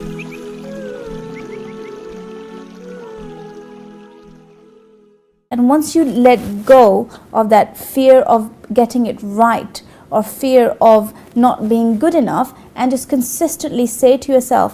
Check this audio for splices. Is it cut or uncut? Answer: uncut